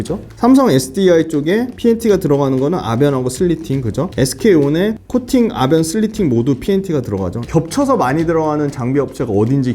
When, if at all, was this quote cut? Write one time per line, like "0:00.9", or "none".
0:07.4